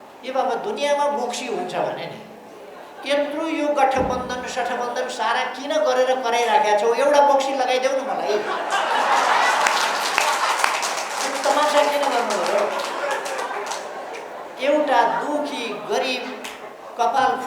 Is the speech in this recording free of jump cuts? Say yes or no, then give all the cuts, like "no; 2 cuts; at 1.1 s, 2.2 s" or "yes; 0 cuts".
yes; 0 cuts